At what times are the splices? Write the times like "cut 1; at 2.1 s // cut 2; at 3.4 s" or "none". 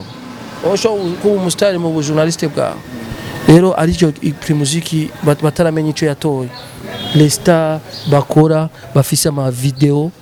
none